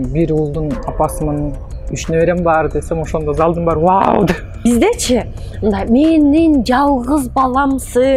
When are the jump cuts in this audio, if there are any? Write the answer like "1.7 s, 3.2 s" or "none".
4.6 s